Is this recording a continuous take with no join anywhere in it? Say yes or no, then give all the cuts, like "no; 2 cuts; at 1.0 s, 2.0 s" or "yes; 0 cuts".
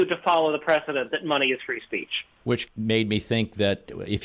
no; 1 cut; at 2.7 s